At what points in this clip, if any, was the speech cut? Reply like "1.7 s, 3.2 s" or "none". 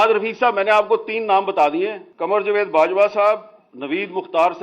2.1 s